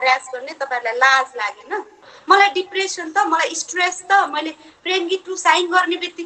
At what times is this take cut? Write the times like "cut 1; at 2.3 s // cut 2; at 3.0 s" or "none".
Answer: cut 1; at 2.1 s